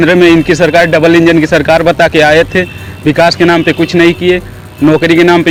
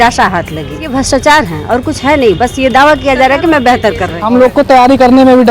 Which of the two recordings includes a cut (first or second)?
second